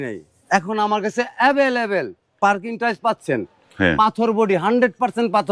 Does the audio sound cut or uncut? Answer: uncut